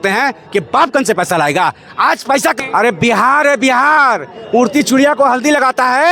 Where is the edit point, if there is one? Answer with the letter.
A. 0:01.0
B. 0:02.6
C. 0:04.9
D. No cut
B